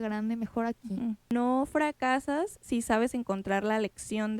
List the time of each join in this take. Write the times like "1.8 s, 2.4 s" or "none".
1.3 s